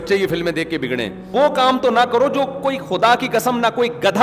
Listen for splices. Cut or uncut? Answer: cut